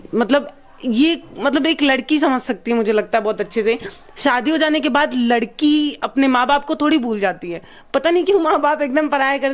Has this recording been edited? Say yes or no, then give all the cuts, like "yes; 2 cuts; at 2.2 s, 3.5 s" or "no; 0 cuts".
no; 0 cuts